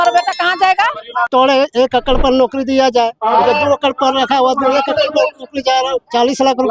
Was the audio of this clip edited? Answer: yes; 1 cut; at 1.3 s

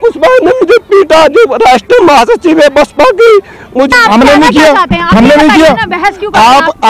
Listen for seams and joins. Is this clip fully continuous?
no; 1 cut; at 3.9 s

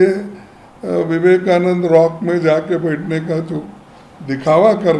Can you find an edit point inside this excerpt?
no; 0 cuts

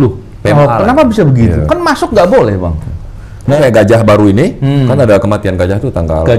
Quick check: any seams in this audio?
yes; 1 cut; at 3.6 s

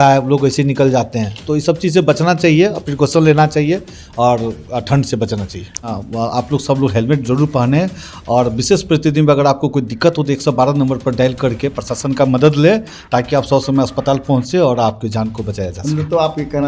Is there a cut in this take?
yes; 1 cut; at 5.9 s

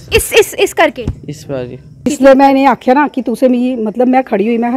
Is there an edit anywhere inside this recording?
yes; 1 cut; at 2.0 s

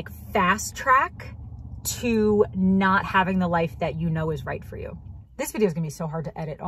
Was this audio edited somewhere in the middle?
yes; 1 cut; at 5.1 s

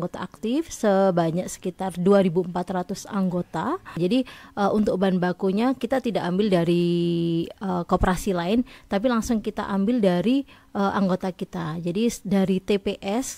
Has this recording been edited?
yes; 1 cut; at 3.9 s

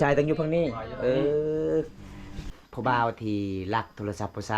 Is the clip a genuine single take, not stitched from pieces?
no; 1 cut; at 2.5 s

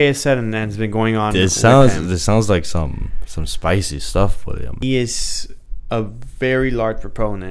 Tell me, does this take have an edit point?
yes; 1 cut; at 4.7 s

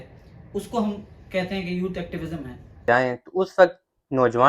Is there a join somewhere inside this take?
yes; 1 cut; at 2.8 s

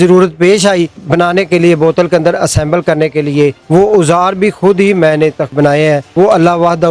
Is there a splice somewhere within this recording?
yes; 3 cuts; at 1.0 s, 3.6 s, 5.7 s

